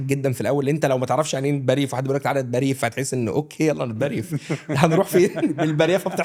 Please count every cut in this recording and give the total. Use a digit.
0